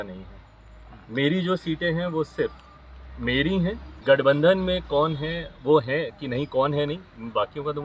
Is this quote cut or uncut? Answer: cut